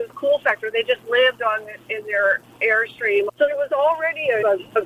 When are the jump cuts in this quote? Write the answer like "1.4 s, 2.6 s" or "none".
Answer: 3.3 s